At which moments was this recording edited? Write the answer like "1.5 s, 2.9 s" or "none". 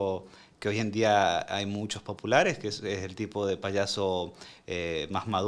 none

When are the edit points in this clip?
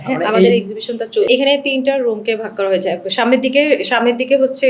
1.3 s

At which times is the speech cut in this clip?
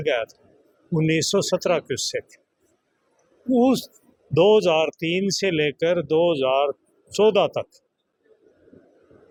none

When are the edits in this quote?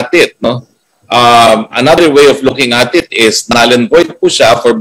none

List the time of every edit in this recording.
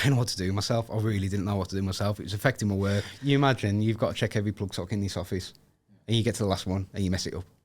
3.1 s

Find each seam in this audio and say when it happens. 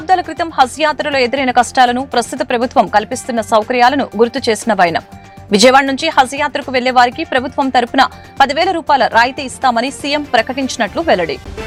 none

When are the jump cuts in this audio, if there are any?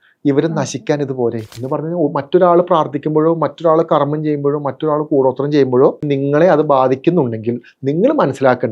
1.5 s, 6.0 s

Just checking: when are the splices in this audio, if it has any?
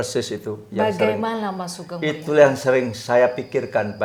none

